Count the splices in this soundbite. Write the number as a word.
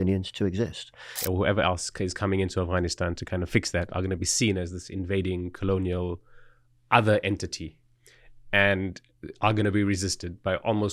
one